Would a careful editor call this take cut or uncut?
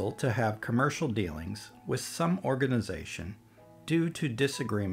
uncut